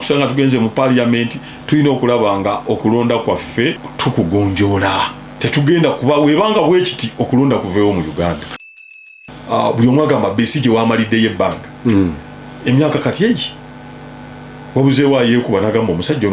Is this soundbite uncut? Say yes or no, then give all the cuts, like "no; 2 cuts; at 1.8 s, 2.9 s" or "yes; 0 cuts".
no; 3 cuts; at 3.9 s, 5.2 s, 8.9 s